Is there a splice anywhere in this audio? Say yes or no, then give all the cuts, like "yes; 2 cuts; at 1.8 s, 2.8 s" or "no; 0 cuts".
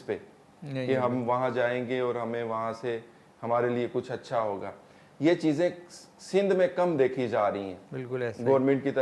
no; 0 cuts